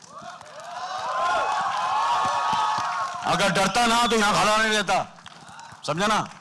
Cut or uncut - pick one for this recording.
uncut